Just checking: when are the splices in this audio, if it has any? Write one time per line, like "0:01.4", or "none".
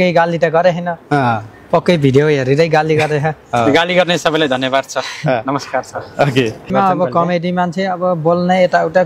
0:06.7